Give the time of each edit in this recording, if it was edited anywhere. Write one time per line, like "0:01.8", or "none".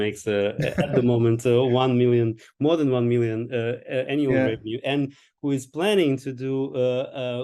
none